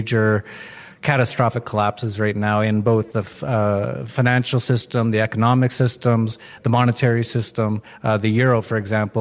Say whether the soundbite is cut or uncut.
uncut